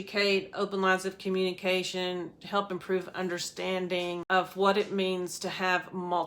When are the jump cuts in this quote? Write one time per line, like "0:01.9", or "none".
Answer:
0:04.2